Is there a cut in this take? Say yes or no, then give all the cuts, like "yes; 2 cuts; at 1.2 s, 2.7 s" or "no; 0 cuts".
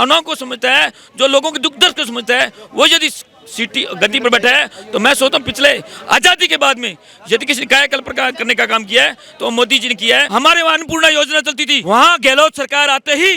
yes; 2 cuts; at 10.3 s, 11.7 s